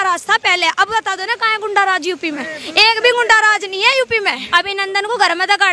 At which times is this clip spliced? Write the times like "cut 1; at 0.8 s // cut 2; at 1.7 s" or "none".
cut 1; at 4.4 s